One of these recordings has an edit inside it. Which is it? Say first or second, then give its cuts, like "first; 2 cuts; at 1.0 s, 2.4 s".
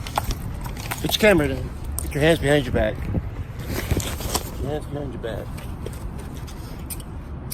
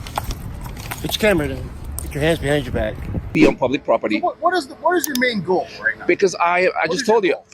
second; 1 cut; at 3.3 s